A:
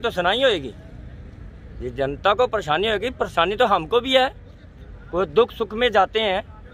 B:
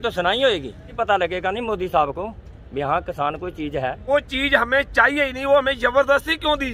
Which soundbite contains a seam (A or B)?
B